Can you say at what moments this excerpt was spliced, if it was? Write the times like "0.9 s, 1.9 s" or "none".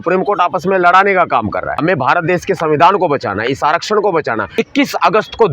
1.8 s, 4.5 s